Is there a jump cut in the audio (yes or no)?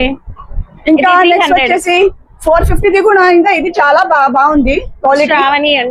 no